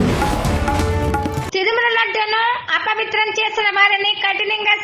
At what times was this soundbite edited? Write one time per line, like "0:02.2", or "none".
0:01.4

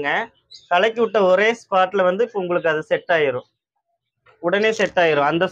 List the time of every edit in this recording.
none

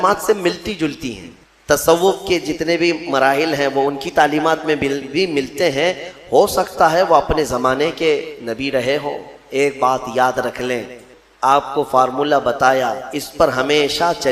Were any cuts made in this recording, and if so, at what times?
0:01.4
0:11.1

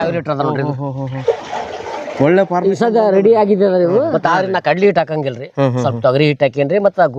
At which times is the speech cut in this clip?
0:04.2

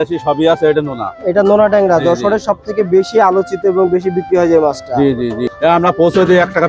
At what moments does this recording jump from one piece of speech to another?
0:05.5

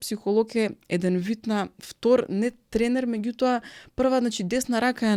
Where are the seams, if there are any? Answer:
none

